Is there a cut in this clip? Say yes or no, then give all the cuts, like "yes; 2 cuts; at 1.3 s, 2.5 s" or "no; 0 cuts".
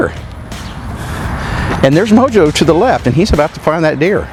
no; 0 cuts